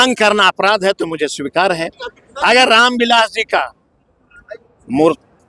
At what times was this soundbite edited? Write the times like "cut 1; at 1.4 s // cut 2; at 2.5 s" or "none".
none